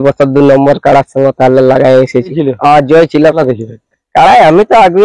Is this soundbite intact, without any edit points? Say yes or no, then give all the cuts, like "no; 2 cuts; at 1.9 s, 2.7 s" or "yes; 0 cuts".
no; 2 cuts; at 2.3 s, 3.4 s